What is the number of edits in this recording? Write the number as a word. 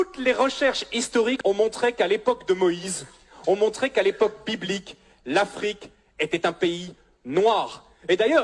one